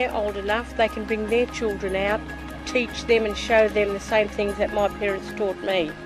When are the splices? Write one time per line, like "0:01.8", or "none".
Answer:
none